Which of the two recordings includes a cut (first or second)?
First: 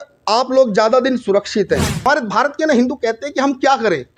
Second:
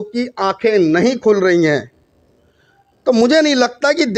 first